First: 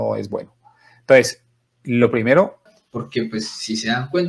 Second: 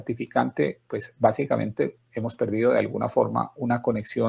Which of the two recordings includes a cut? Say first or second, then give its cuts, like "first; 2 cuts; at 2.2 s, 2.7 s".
first; 1 cut; at 2.9 s